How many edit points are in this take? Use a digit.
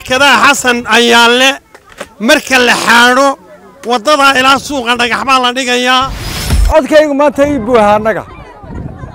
1